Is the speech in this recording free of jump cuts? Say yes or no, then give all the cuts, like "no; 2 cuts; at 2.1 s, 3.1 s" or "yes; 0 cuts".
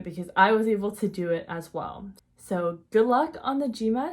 no; 1 cut; at 2.3 s